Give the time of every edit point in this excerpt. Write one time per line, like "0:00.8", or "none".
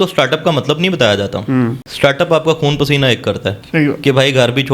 0:01.8
0:03.6